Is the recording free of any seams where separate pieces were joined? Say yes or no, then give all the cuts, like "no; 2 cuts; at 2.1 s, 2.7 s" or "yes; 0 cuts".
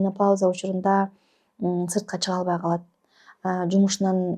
yes; 0 cuts